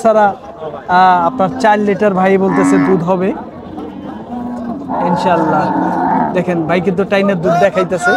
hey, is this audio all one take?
yes; 0 cuts

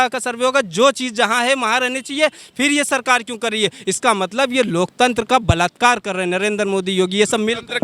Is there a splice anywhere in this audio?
no; 0 cuts

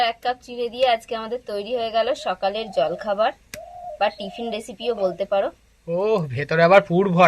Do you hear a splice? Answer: no; 0 cuts

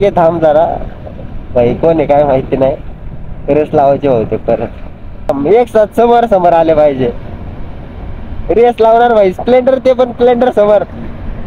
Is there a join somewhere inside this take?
yes; 1 cut; at 5.3 s

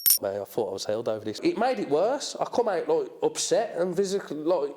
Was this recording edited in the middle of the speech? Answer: yes; 1 cut; at 1.4 s

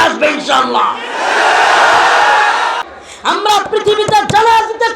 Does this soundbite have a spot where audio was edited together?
yes; 1 cut; at 2.9 s

